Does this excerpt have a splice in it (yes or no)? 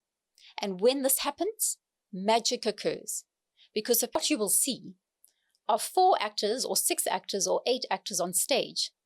yes